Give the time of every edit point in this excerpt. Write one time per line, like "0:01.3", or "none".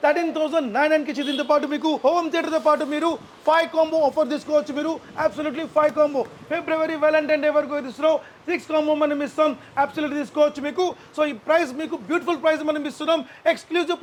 none